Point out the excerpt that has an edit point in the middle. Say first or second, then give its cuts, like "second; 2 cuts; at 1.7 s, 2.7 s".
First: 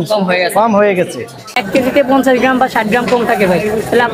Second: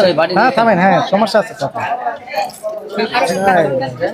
first; 1 cut; at 1.6 s